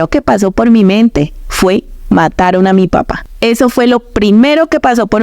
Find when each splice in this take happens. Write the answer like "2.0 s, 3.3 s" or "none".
3.2 s